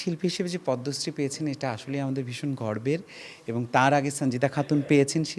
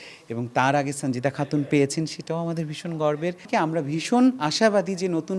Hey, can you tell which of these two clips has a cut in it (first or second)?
second